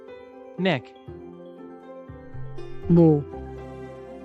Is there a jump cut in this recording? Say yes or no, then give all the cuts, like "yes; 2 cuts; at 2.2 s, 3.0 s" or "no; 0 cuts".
no; 0 cuts